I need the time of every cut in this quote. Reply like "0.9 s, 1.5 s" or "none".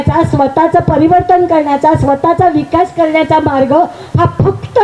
none